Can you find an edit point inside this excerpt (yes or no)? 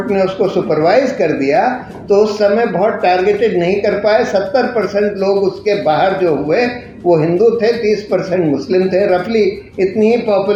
no